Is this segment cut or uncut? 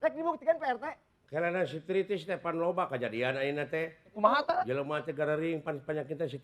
uncut